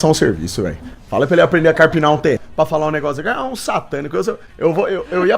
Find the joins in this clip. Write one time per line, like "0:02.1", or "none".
0:02.4
0:04.5